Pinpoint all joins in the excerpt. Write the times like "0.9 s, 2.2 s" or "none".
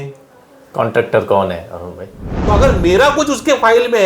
2.4 s